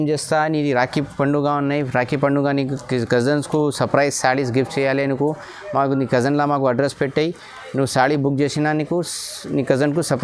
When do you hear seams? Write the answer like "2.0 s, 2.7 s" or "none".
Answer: none